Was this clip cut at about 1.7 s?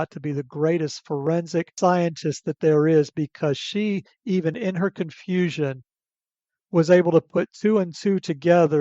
yes; 1 cut; at 1.7 s

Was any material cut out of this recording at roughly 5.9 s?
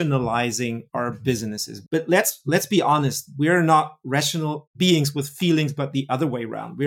no; 2 cuts; at 0.8 s, 1.7 s

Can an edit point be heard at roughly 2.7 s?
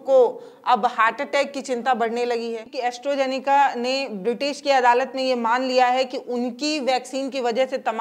yes; 1 cut; at 2.7 s

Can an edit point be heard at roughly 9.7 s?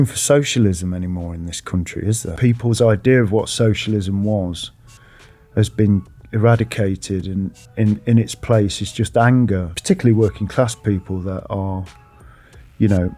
yes; 2 cuts; at 2.3 s, 9.7 s

